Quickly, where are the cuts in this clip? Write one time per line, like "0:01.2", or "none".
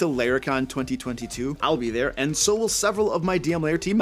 none

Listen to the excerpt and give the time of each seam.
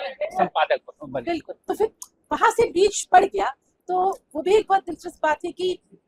none

